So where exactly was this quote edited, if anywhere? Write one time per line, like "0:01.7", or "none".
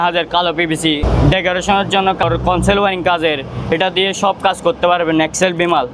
0:01.0
0:02.2